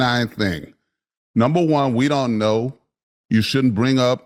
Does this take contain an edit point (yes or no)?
no